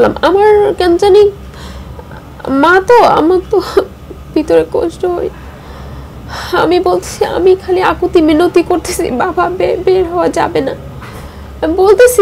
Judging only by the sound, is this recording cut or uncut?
uncut